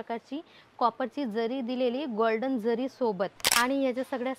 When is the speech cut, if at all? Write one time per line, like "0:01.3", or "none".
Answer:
0:03.4